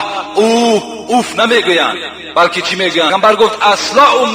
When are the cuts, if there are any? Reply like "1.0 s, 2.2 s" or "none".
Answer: 3.1 s